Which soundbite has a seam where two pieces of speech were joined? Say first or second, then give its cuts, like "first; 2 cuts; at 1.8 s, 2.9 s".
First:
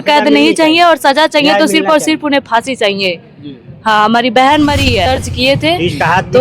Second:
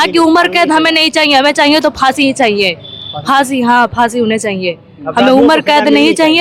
first; 1 cut; at 5.1 s